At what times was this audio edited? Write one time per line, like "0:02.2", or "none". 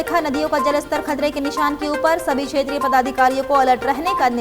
none